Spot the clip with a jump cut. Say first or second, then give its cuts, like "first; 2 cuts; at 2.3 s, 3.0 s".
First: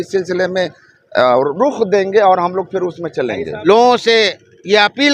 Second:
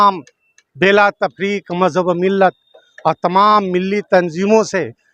first; 1 cut; at 3.5 s